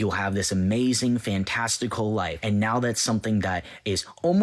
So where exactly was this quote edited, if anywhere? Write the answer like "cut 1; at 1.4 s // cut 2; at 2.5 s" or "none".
cut 1; at 2.4 s